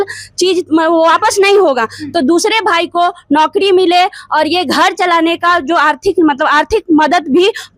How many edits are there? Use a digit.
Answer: 0